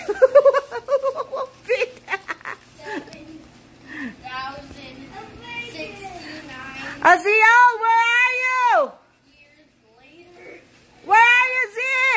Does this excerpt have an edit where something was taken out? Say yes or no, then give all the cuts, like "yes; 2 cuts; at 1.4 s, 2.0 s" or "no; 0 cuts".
no; 0 cuts